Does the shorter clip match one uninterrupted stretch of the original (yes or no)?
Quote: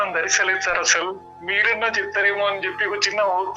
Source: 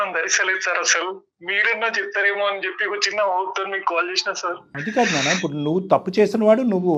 yes